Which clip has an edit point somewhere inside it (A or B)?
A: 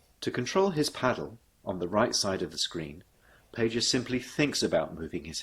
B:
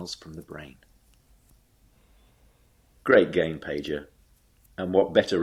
A